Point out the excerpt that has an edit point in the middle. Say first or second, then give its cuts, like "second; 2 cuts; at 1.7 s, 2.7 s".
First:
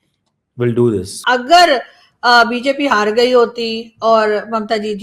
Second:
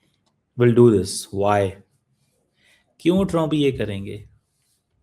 first; 1 cut; at 1.1 s